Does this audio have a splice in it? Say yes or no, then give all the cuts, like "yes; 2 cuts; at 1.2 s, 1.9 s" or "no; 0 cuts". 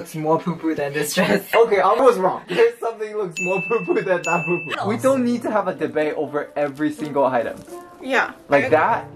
yes; 3 cuts; at 1.5 s, 2.4 s, 4.7 s